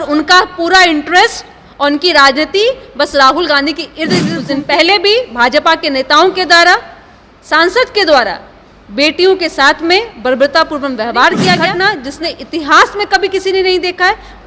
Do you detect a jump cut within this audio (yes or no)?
yes